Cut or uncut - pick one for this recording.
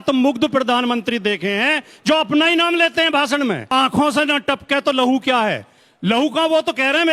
cut